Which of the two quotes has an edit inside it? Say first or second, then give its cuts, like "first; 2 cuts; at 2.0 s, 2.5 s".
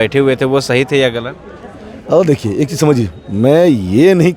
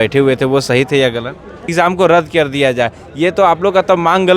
second; 1 cut; at 1.7 s